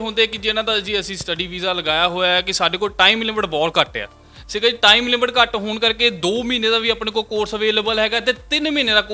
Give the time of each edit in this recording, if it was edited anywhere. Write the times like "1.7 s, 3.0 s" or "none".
none